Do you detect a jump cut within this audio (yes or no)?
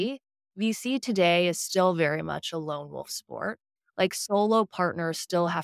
no